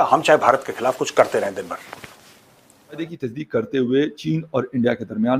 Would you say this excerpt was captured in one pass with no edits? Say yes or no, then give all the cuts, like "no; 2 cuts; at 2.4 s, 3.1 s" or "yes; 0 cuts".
no; 1 cut; at 3.1 s